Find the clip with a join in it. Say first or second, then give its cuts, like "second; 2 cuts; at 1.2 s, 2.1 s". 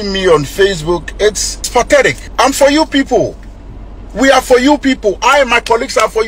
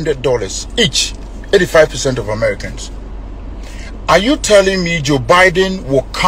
first; 2 cuts; at 1.7 s, 2.2 s